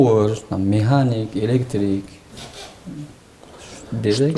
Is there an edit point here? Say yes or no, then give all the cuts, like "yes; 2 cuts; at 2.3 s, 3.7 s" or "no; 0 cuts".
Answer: no; 0 cuts